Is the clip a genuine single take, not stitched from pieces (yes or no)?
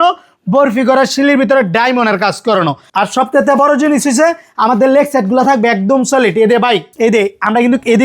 no